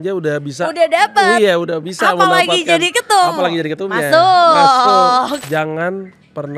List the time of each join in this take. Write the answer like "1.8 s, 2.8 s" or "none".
5.4 s